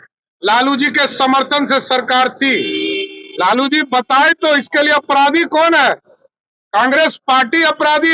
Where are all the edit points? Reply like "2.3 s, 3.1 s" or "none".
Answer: none